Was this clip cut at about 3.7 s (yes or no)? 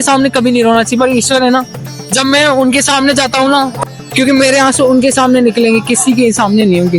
yes